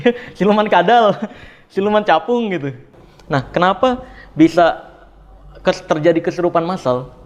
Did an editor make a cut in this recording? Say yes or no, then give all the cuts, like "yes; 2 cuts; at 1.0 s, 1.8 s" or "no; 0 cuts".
yes; 1 cut; at 2.9 s